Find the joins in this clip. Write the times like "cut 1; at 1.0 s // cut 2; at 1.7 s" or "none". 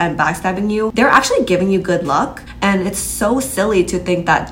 cut 1; at 0.9 s // cut 2; at 2.4 s